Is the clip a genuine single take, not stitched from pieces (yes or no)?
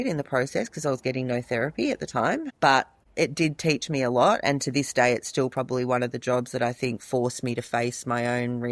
no